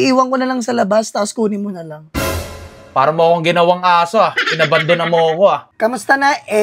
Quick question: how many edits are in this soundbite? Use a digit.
1